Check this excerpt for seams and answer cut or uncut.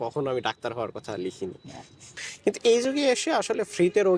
cut